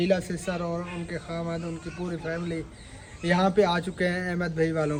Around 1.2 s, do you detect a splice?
no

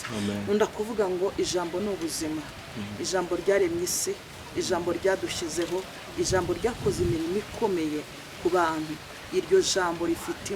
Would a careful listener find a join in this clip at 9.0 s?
no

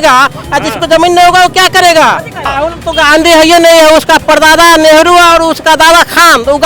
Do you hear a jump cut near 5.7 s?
no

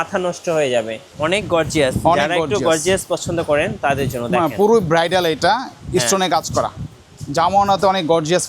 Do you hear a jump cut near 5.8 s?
no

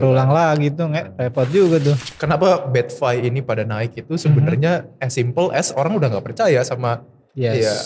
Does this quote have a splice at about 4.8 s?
no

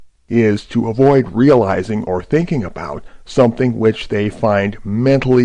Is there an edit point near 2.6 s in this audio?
yes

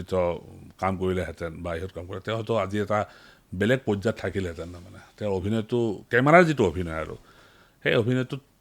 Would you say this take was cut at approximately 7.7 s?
no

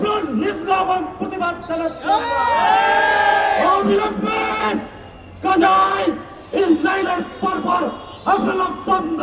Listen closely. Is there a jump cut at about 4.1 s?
no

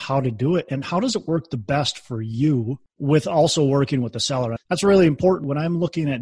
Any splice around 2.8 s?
yes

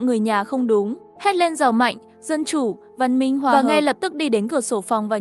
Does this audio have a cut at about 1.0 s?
yes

